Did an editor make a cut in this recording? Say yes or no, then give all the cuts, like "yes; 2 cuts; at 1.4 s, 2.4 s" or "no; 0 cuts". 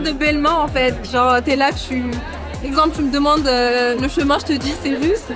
no; 0 cuts